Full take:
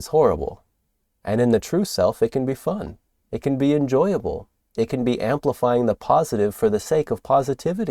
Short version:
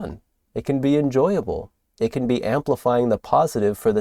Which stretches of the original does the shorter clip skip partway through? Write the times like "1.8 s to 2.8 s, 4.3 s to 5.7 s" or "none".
none